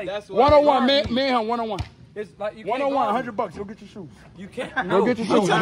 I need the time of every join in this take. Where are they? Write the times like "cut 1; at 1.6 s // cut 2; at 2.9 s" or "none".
none